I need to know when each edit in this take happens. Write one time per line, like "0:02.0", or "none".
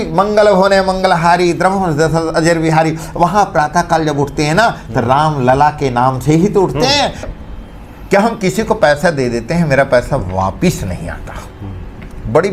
0:07.3